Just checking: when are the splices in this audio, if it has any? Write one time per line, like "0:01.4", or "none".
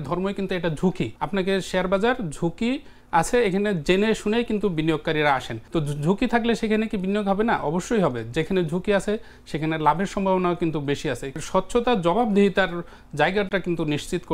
0:01.2
0:05.6
0:11.4